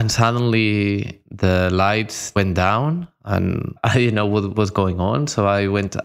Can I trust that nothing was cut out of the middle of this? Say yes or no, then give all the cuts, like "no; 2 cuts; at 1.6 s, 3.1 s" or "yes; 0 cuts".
no; 2 cuts; at 2.3 s, 4.5 s